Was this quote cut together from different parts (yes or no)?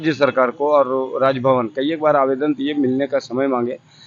no